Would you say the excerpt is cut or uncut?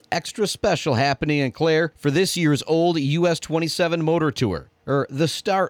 cut